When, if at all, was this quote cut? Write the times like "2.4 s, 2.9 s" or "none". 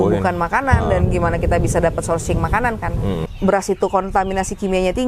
3.3 s